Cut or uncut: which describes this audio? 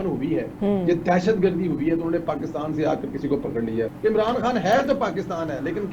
cut